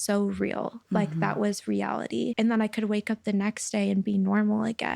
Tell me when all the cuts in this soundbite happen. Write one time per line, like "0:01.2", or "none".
0:02.3